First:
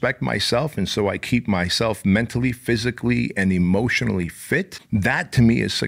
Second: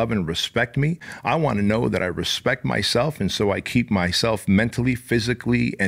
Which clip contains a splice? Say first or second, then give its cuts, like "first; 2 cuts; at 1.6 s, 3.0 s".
first; 1 cut; at 4.8 s